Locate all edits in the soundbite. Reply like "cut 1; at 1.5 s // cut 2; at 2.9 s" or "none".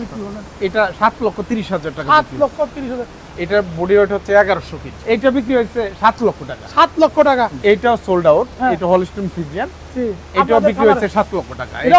cut 1; at 3.3 s // cut 2; at 4.9 s // cut 3; at 7.6 s